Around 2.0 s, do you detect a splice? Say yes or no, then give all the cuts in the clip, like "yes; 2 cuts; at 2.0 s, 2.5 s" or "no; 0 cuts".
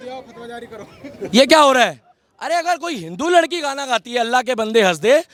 no; 0 cuts